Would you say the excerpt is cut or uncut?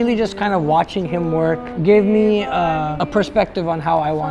cut